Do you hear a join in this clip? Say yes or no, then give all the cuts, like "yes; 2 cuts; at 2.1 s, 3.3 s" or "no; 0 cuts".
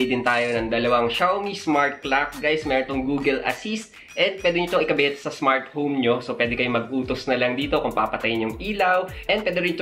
no; 0 cuts